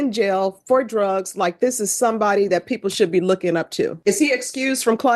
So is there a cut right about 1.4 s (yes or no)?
no